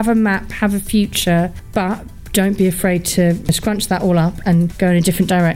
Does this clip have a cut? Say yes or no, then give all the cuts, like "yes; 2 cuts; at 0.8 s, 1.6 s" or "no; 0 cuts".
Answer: yes; 3 cuts; at 1.6 s, 3.5 s, 4.7 s